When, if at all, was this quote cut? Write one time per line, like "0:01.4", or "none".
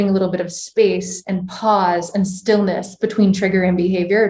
none